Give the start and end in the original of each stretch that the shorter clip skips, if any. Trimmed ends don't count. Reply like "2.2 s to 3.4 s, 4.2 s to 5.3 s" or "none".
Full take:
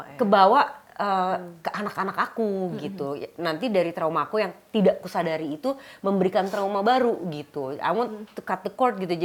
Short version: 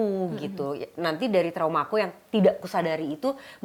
none